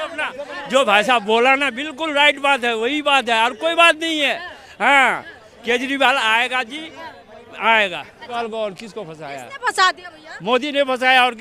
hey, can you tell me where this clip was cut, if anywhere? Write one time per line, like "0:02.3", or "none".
0:08.3

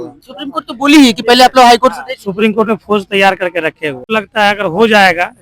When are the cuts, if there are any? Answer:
0:04.0

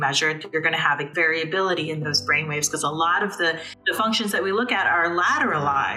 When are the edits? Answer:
0:01.1
0:03.7

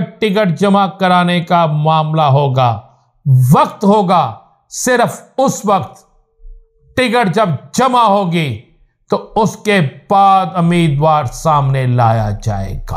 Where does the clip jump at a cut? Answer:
none

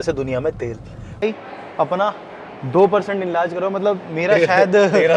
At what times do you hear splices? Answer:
0:01.2

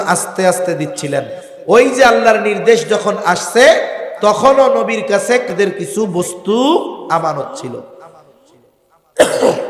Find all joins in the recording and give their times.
0:05.5

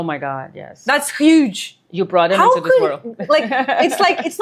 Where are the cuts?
none

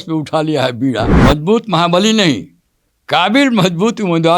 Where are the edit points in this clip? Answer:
0:01.1

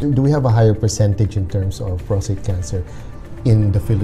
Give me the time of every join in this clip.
none

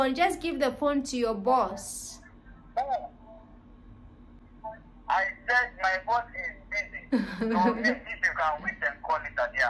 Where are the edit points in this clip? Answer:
none

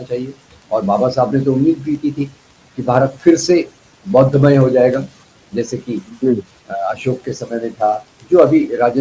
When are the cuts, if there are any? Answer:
0:08.1

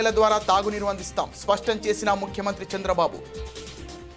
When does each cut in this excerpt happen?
0:03.2

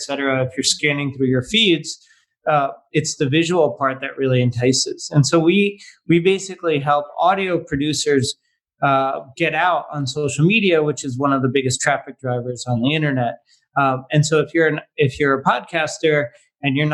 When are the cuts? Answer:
none

